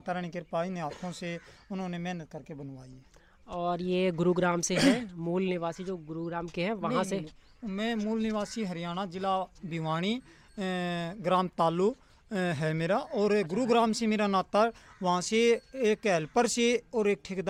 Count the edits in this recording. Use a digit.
0